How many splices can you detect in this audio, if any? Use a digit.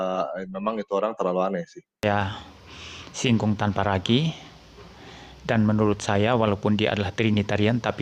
1